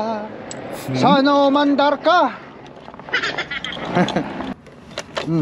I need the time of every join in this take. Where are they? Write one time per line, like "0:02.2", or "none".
0:04.5